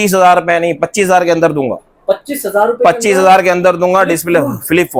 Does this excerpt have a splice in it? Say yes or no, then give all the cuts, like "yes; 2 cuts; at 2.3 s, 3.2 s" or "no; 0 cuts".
no; 0 cuts